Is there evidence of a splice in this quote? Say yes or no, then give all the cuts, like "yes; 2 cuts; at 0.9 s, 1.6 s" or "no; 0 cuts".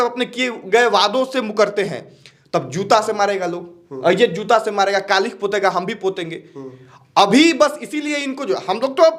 no; 0 cuts